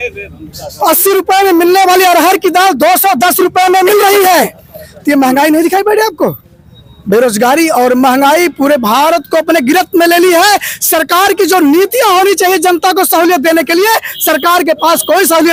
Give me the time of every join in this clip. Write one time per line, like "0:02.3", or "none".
none